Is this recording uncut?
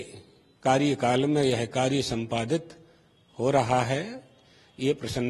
yes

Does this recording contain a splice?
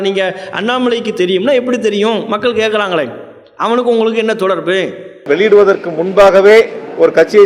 yes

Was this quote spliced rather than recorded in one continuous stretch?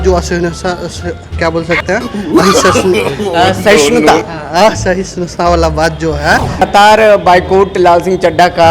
yes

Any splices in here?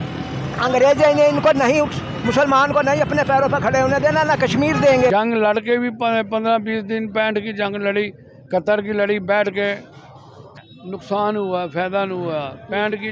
yes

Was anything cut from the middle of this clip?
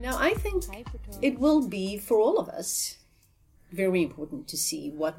no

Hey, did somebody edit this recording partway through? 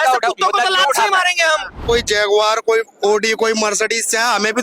yes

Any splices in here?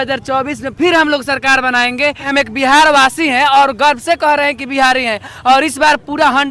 yes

